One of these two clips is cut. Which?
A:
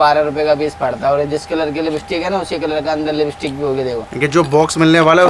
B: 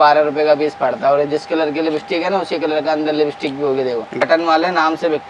B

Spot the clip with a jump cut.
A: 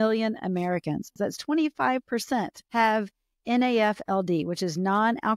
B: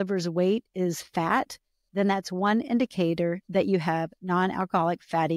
A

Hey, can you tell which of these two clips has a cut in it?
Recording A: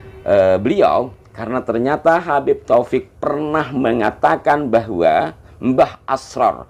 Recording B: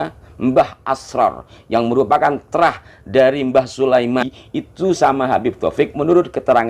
B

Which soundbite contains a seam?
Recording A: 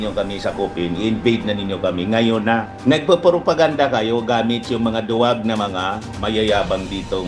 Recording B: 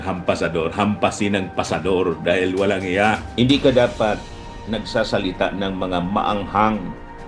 B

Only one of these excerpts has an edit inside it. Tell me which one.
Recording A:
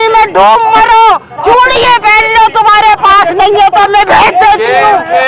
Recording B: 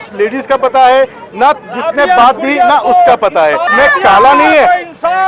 B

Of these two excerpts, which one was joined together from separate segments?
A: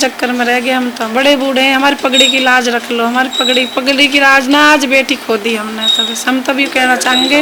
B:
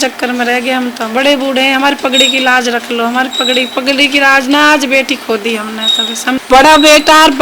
B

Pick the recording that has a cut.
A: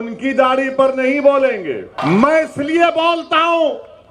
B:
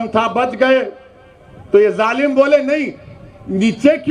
A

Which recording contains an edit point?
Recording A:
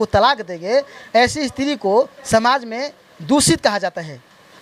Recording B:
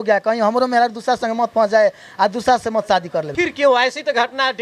B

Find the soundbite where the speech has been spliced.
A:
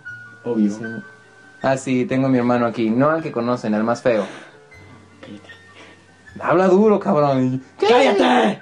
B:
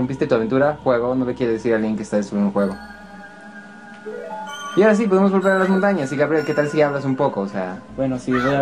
B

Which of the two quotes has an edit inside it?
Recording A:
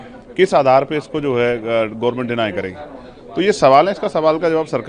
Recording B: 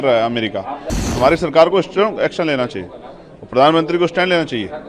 B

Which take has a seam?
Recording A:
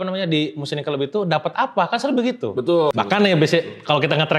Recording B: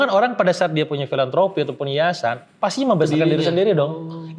A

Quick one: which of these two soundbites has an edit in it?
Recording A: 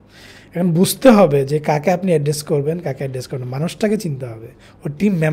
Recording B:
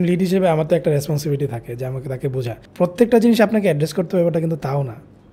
B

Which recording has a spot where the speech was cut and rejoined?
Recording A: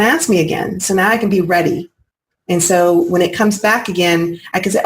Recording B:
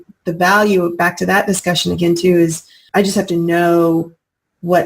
B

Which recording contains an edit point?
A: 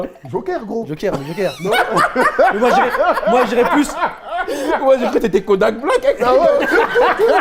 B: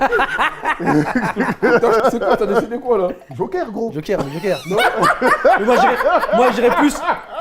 B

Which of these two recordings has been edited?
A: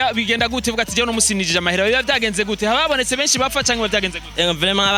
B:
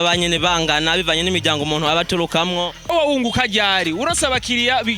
B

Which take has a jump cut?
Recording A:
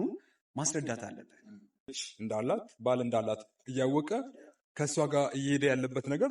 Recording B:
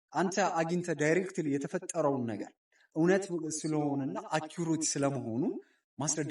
A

